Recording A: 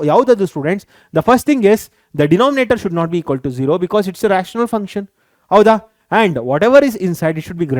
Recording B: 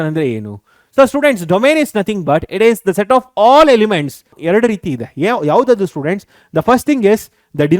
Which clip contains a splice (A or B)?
B